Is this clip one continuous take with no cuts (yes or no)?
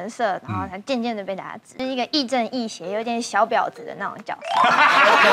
no